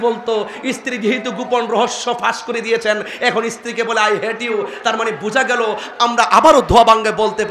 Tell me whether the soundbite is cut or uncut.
uncut